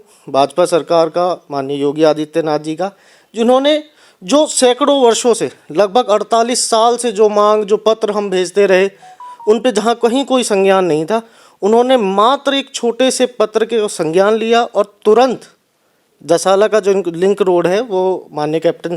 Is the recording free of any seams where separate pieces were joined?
yes; 0 cuts

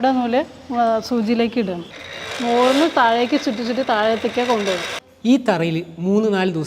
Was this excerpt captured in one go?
no; 1 cut; at 5.0 s

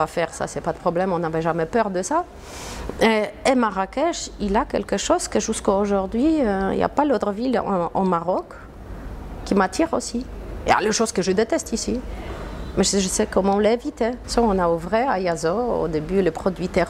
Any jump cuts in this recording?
yes; 1 cut; at 14.2 s

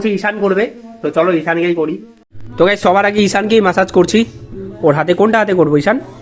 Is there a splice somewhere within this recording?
no; 0 cuts

